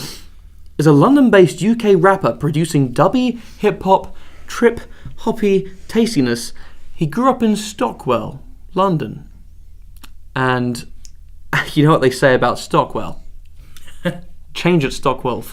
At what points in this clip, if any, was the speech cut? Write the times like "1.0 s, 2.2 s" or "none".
none